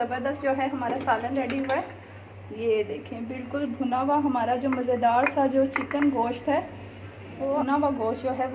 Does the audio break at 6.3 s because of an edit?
no; 1 cut; at 7.6 s

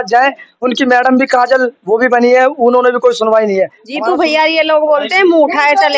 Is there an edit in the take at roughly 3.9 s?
yes; 1 cut; at 3.9 s

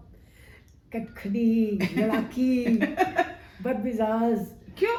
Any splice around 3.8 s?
no; 0 cuts

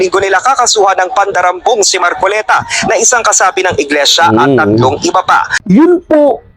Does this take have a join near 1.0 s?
no; 1 cut; at 5.5 s

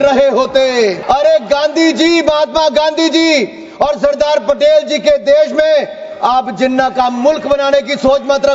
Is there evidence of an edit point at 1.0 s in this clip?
yes; 1 cut; at 1.0 s

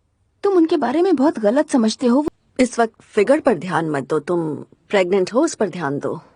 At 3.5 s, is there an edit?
no; 1 cut; at 2.2 s

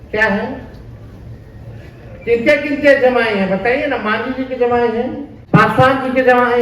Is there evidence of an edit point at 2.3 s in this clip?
no; 1 cut; at 5.3 s

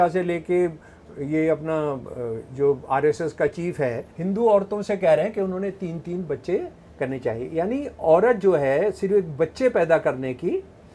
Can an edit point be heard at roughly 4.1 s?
yes; 1 cut; at 4.1 s

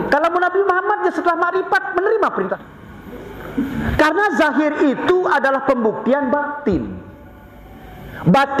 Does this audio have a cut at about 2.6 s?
yes; 1 cut; at 2.6 s

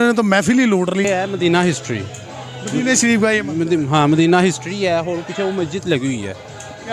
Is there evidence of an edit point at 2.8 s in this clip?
no; 1 cut; at 1.1 s

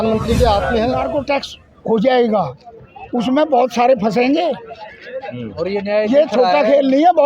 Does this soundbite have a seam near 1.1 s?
yes; 1 cut; at 1.1 s

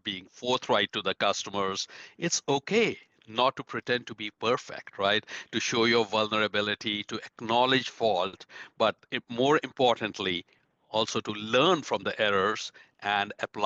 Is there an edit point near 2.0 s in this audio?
no; 0 cuts

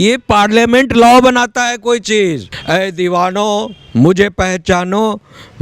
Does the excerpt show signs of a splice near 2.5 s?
yes; 1 cut; at 2.5 s

